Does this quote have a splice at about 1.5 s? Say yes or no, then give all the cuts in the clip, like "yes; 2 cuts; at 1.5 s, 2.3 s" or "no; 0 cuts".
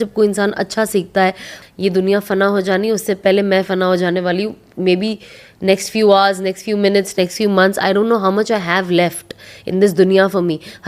yes; 1 cut; at 1.5 s